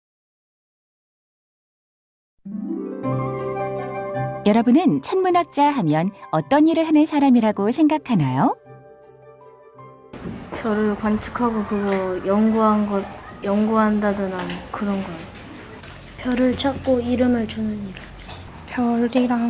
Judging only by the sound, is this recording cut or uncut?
uncut